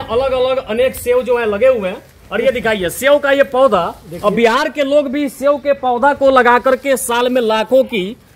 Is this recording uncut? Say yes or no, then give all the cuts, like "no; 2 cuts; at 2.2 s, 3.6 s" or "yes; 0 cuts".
yes; 0 cuts